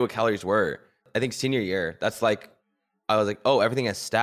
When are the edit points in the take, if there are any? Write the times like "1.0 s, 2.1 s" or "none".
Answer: 1.1 s